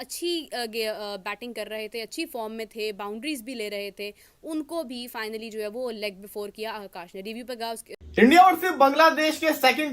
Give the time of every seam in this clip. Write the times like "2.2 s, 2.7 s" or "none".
8.0 s